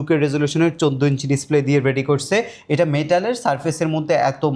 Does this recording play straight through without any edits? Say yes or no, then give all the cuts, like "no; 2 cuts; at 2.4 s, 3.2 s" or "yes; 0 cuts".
yes; 0 cuts